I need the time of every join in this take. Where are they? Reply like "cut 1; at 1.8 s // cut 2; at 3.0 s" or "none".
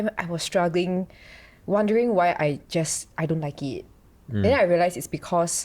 none